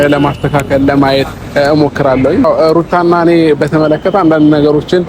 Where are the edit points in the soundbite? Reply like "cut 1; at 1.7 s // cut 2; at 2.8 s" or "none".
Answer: cut 1; at 2.4 s